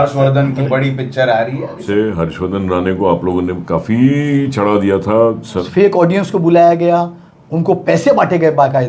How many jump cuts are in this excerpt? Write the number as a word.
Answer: two